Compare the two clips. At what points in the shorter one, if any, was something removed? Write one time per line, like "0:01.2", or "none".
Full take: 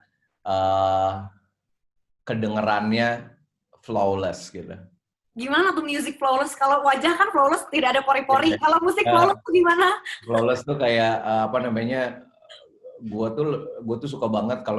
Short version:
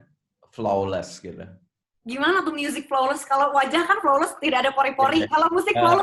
none